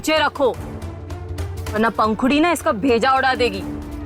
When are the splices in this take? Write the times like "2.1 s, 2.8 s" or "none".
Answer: none